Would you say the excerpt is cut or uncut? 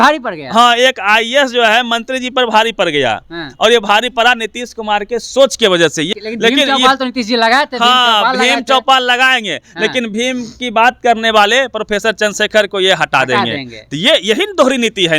cut